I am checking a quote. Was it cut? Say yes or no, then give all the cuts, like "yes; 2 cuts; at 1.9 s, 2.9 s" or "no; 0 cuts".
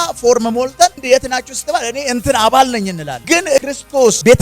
yes; 2 cuts; at 1.0 s, 3.6 s